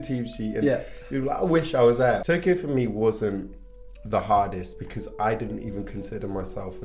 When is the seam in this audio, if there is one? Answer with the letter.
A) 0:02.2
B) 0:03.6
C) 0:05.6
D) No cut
A